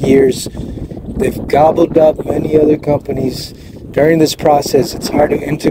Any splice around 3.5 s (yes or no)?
no